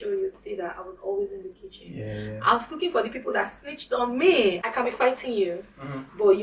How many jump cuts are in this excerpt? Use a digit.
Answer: 1